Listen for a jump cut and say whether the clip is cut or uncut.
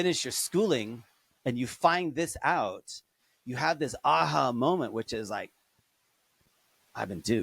uncut